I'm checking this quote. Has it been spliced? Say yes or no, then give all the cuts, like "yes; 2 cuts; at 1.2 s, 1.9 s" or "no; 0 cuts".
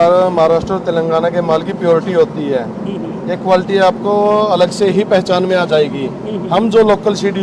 no; 0 cuts